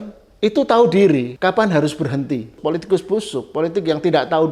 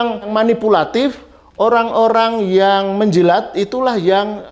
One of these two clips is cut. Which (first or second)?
first